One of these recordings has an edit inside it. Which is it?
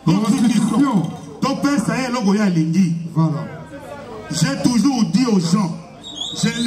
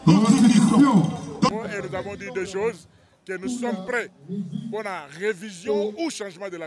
second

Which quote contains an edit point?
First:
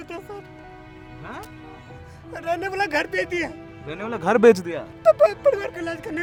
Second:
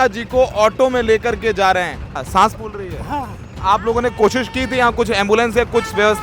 second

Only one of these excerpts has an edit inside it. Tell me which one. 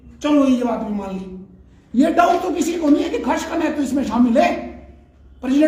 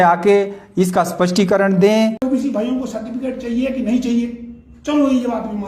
second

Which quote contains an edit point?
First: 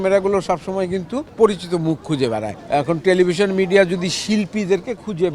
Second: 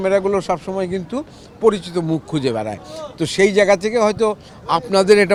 first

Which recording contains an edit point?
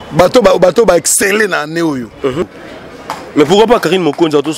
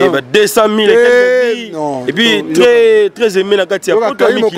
first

